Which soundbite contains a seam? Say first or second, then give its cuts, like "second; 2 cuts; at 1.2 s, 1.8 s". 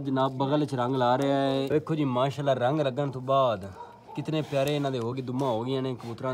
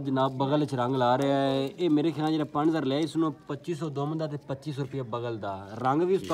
first; 1 cut; at 1.7 s